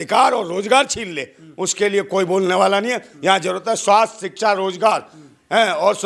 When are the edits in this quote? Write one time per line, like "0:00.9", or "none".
none